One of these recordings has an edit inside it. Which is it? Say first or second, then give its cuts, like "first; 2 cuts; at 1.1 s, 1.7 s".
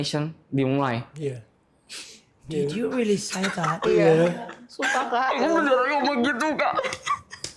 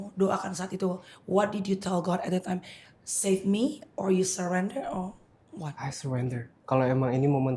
second; 1 cut; at 6.5 s